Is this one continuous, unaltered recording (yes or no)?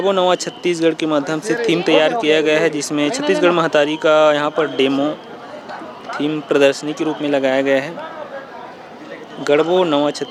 yes